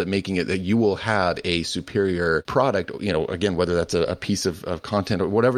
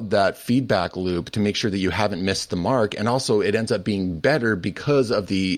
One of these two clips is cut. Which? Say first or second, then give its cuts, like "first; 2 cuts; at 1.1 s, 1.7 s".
first; 1 cut; at 2.5 s